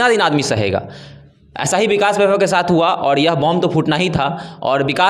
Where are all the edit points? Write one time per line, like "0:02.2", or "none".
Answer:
none